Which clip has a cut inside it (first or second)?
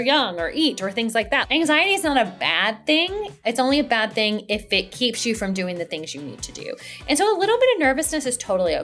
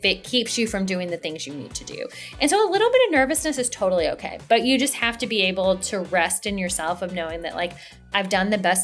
first